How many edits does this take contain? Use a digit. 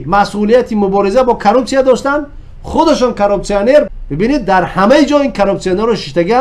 1